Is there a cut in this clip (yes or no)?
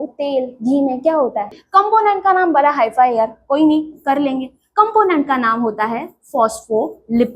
yes